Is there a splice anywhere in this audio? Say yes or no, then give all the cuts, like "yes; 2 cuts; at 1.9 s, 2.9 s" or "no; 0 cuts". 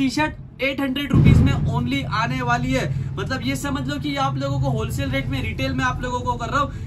no; 0 cuts